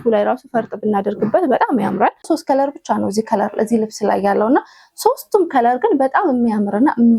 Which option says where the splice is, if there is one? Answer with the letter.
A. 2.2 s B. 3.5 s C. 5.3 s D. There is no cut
A